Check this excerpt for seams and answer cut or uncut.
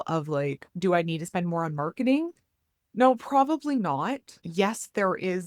cut